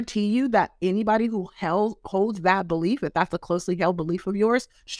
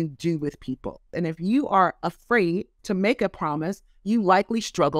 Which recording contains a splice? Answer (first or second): second